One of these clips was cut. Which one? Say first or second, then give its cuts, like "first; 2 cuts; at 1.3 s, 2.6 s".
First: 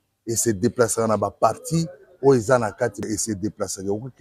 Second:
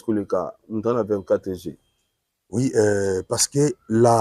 first; 1 cut; at 3.0 s